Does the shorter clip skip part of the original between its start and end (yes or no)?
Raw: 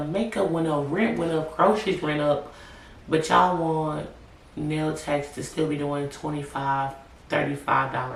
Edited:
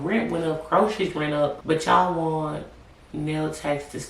yes